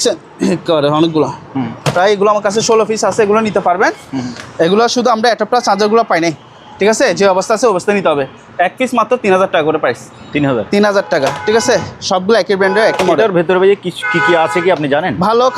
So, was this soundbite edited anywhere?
no; 0 cuts

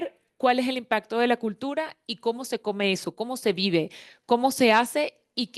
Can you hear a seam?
no; 0 cuts

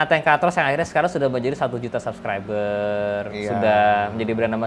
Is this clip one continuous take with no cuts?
yes; 0 cuts

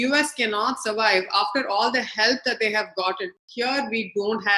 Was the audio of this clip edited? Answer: yes; 1 cut; at 3.4 s

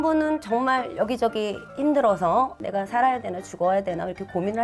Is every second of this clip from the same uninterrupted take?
yes; 0 cuts

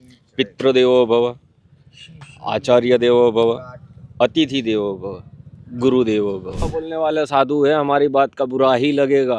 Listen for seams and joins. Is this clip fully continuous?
no; 1 cut; at 6.7 s

